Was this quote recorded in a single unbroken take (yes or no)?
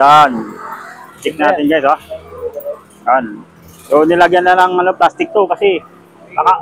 yes